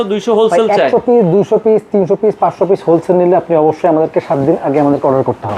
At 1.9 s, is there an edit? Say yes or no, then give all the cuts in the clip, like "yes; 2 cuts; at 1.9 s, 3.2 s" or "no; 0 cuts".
no; 0 cuts